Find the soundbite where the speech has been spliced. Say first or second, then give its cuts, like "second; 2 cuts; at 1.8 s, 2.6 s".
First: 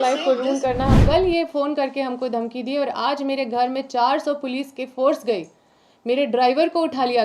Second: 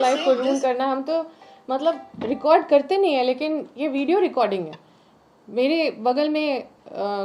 first; 1 cut; at 1.0 s